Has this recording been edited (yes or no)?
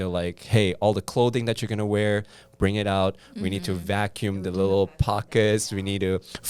no